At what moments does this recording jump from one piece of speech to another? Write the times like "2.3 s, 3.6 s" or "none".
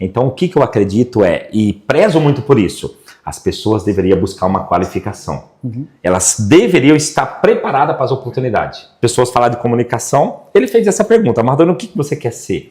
8.8 s